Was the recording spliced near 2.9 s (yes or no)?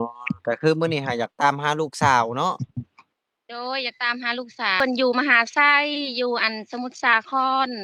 no